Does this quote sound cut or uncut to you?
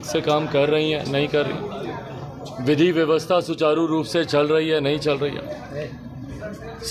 uncut